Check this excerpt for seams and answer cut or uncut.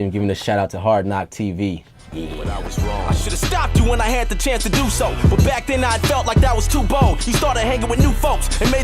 cut